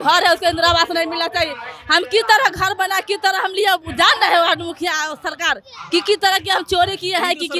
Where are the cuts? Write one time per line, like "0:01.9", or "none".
none

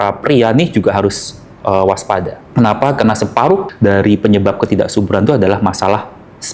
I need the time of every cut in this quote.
0:02.4
0:03.7

